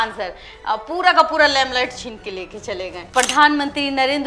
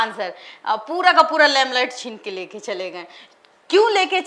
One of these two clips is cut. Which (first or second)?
first